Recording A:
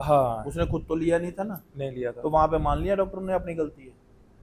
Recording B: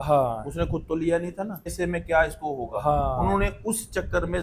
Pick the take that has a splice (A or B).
B